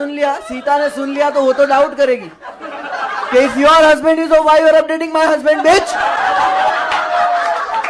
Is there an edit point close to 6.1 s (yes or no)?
no